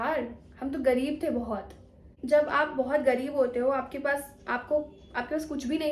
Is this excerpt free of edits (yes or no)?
no